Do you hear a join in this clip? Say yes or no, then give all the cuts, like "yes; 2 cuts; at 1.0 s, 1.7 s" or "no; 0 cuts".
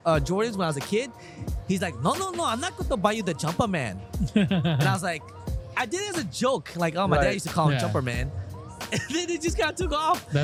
no; 0 cuts